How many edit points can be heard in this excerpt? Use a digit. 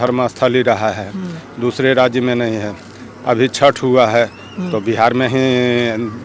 0